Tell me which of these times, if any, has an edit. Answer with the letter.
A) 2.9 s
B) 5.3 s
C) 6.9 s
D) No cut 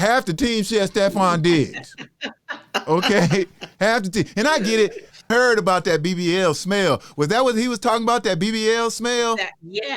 B